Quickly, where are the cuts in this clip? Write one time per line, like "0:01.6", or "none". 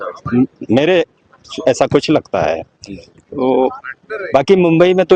none